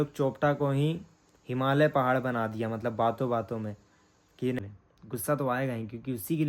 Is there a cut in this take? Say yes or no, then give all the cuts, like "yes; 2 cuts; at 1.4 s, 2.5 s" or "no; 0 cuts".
yes; 1 cut; at 4.6 s